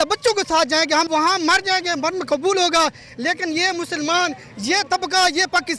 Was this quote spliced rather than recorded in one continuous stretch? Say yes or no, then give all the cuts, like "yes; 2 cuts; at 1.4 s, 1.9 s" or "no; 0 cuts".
yes; 1 cut; at 1.1 s